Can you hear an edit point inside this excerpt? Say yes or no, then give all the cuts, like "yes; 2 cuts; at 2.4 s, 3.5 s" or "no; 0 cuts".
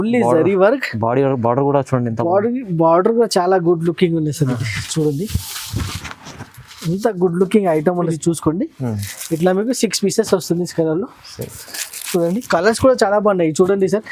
yes; 1 cut; at 8.1 s